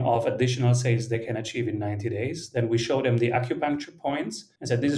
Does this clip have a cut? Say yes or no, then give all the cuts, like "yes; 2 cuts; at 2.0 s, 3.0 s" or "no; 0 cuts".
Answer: no; 0 cuts